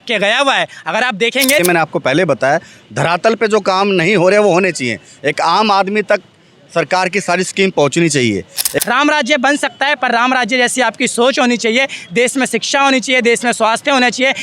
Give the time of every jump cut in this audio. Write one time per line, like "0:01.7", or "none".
0:01.6
0:08.8